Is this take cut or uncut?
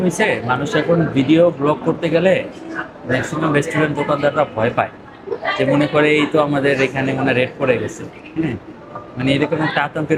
uncut